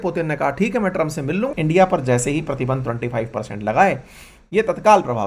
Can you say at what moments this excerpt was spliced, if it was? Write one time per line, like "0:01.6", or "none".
0:01.5